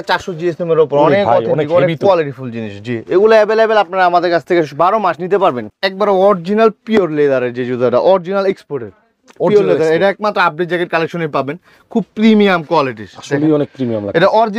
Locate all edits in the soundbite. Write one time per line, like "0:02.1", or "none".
0:05.7